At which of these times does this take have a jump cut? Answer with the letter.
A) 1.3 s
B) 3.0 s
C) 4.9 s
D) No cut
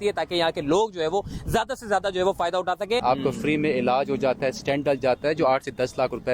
B